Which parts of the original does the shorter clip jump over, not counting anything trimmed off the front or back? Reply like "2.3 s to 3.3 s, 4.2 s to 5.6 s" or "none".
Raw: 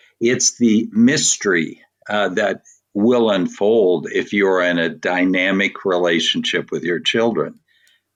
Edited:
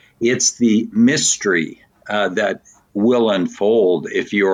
none